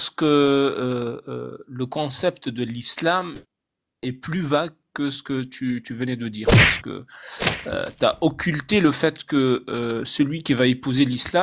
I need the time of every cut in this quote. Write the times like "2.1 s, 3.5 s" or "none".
none